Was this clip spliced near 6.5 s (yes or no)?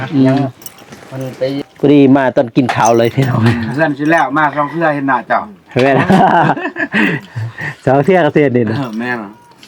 no